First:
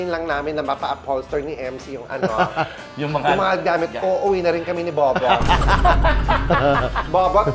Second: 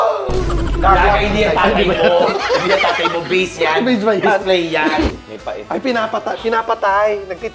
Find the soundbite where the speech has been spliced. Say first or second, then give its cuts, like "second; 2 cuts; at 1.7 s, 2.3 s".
second; 1 cut; at 5.1 s